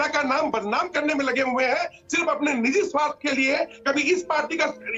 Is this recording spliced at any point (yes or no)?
no